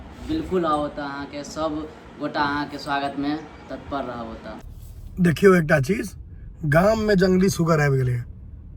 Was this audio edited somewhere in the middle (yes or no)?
yes